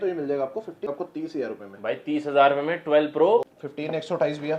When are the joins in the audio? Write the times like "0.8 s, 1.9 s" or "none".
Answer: 0.9 s, 3.5 s

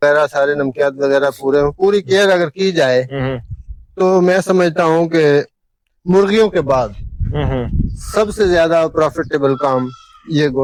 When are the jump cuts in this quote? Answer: none

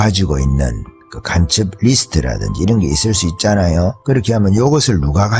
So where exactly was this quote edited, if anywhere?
4.0 s

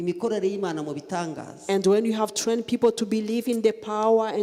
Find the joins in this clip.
none

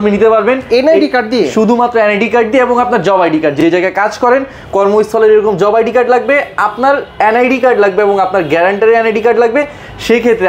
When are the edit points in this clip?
none

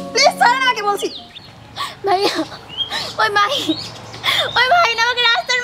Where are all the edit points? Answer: 1.2 s

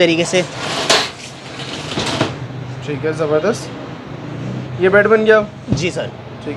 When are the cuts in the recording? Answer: none

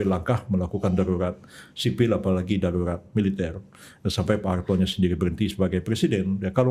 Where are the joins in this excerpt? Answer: none

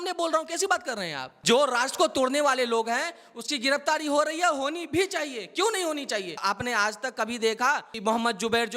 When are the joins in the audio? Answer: 1.3 s, 6.4 s, 7.9 s

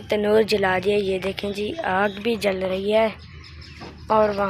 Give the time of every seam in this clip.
none

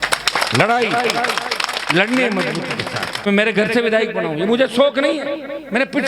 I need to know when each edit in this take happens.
3.3 s

